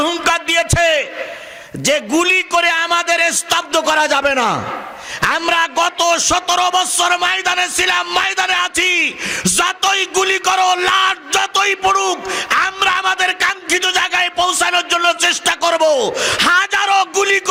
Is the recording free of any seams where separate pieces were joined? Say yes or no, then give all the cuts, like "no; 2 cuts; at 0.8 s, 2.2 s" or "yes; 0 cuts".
yes; 0 cuts